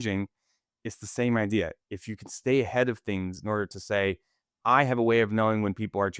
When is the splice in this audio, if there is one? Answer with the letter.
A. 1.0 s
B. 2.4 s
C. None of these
C